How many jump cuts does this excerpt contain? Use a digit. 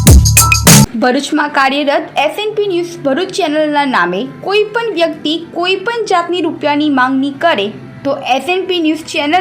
1